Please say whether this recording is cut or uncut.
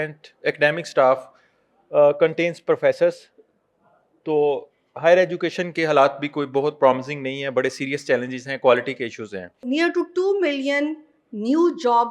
cut